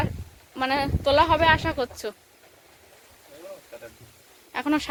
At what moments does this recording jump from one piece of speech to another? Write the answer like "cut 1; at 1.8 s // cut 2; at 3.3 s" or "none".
none

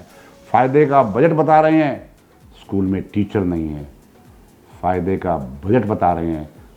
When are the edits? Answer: none

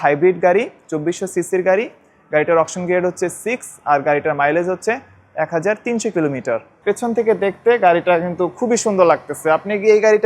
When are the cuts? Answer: cut 1; at 6.7 s

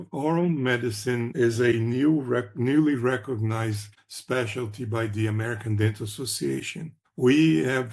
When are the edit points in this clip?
cut 1; at 1.3 s

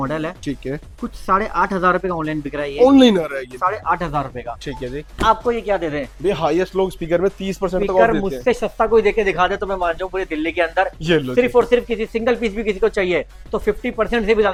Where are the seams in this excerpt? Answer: none

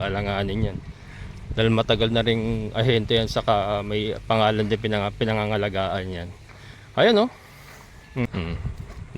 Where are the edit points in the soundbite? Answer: cut 1; at 8.3 s

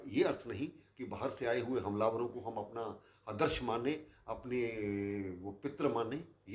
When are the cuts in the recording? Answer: none

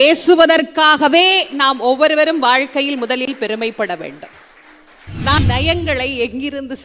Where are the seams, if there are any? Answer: cut 1; at 5.4 s

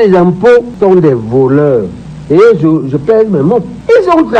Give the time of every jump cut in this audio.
none

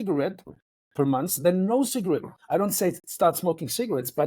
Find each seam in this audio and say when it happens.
cut 1; at 2.3 s

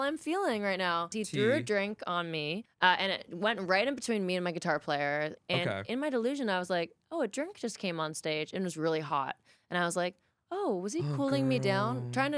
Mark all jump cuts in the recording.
cut 1; at 1.1 s // cut 2; at 2.6 s // cut 3; at 5.4 s

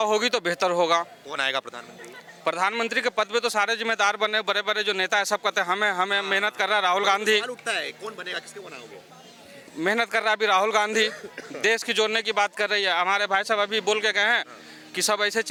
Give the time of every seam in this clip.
none

